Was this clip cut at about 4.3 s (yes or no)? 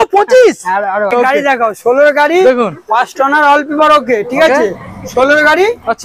no